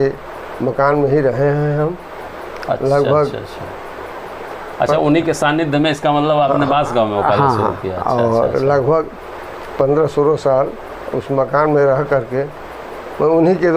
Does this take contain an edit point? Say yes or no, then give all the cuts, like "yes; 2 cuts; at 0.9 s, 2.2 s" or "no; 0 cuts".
no; 0 cuts